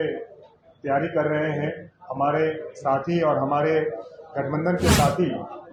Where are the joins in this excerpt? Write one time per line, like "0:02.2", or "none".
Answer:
none